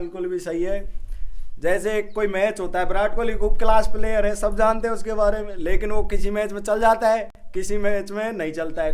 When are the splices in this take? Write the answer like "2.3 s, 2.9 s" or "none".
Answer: none